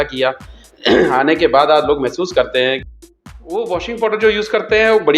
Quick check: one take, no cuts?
no; 1 cut; at 2.8 s

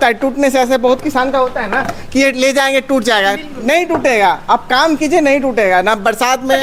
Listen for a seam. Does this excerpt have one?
no; 0 cuts

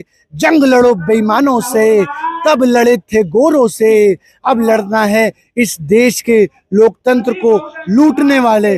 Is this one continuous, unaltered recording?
yes; 0 cuts

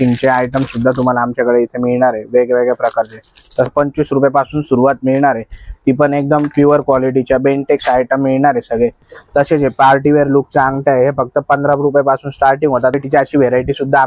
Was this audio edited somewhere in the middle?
yes; 3 cuts; at 3.7 s, 9.1 s, 12.9 s

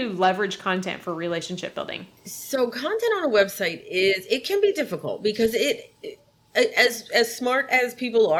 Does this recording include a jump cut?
no; 0 cuts

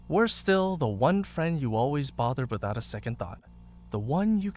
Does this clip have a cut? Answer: yes; 1 cut; at 2.5 s

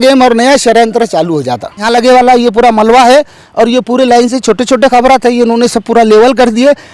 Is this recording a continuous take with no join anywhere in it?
no; 1 cut; at 1.8 s

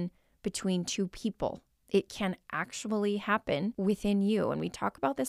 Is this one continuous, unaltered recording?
no; 2 cuts; at 1.7 s, 3.7 s

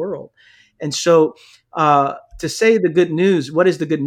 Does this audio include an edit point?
no; 0 cuts

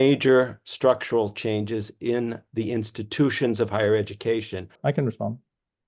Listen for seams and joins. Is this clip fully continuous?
no; 1 cut; at 4.8 s

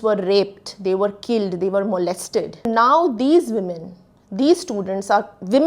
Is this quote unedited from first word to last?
no; 1 cut; at 2.7 s

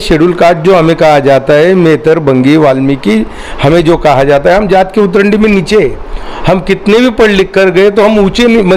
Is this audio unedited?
yes; 0 cuts

